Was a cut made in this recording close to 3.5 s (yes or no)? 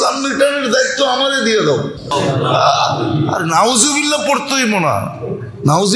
no